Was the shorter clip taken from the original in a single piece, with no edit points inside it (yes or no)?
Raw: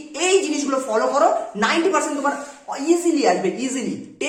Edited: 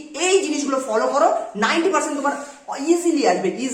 yes